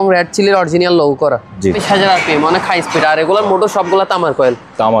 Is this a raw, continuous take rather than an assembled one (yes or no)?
no